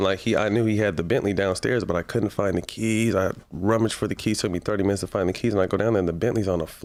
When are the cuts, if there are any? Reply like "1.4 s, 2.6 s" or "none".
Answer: none